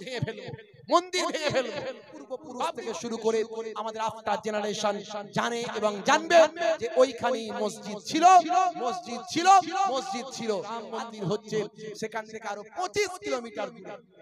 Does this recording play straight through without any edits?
no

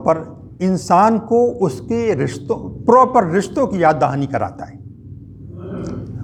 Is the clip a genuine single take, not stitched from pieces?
yes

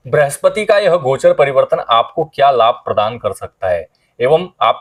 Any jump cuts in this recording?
no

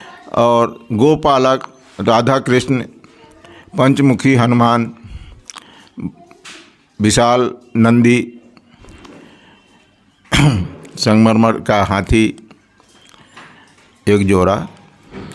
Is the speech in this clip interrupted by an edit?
no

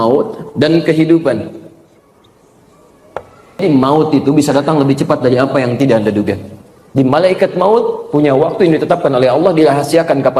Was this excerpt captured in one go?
no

